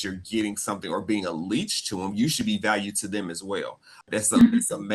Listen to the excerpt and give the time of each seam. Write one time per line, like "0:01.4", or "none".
0:04.0